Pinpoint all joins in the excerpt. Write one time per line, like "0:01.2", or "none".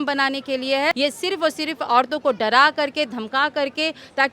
0:01.0